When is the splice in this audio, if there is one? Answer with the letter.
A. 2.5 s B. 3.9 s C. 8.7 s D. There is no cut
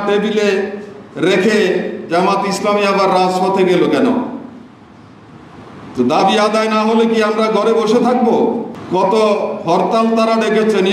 C